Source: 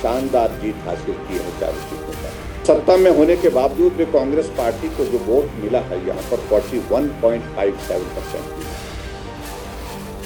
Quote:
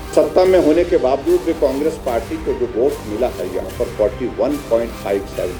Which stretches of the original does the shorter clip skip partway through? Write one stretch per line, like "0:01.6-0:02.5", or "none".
none